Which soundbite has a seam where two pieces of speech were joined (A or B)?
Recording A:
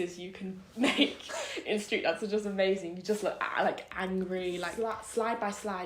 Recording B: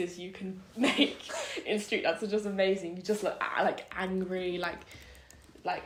A